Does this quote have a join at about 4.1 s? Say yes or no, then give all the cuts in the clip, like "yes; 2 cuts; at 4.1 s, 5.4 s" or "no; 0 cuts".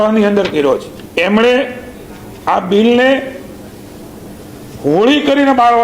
no; 1 cut; at 1.0 s